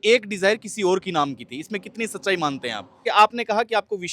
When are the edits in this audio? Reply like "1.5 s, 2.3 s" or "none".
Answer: 3.0 s